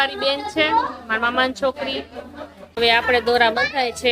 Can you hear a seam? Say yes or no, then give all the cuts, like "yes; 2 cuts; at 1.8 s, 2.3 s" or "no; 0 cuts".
yes; 1 cut; at 2.8 s